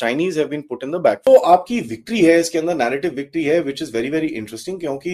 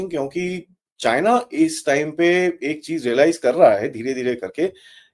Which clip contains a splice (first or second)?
first